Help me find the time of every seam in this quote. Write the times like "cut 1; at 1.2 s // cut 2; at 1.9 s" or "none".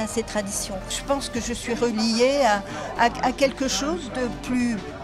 cut 1; at 1.0 s